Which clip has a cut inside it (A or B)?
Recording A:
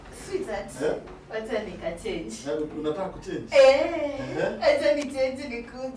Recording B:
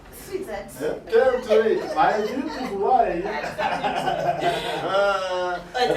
B